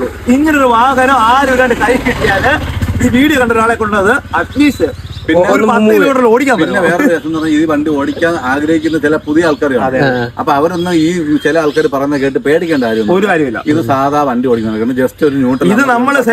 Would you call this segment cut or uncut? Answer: uncut